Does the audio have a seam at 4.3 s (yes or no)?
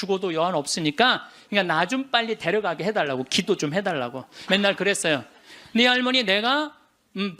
yes